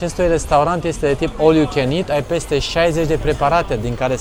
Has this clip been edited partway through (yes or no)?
no